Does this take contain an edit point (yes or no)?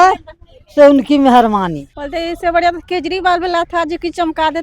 yes